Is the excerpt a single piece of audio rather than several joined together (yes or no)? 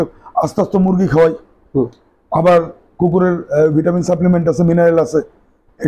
yes